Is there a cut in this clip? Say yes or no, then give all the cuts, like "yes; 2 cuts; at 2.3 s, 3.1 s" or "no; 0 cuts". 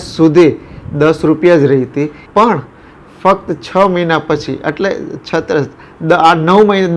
yes; 1 cut; at 2.2 s